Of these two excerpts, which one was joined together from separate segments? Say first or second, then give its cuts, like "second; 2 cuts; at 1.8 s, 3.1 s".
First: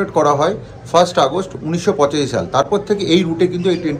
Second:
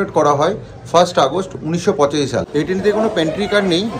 second; 1 cut; at 2.5 s